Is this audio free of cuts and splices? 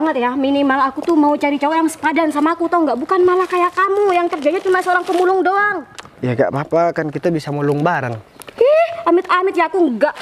yes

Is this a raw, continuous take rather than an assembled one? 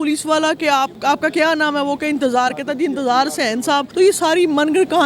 no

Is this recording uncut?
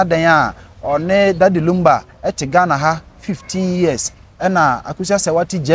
yes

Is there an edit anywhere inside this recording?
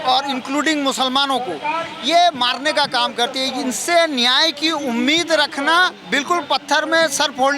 yes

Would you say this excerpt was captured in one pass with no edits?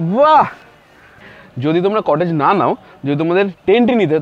yes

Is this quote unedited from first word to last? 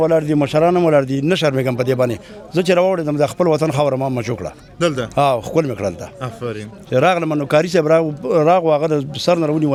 yes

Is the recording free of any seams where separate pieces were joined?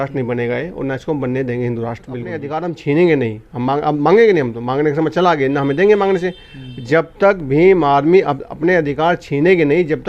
no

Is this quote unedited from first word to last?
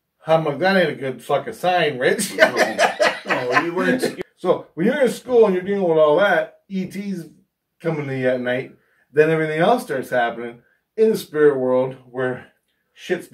no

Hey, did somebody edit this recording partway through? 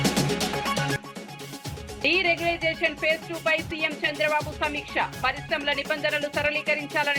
yes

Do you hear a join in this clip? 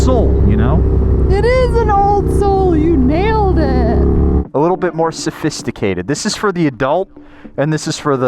yes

